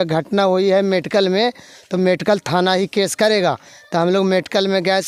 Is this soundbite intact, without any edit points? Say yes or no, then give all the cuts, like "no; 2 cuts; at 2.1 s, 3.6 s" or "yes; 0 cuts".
yes; 0 cuts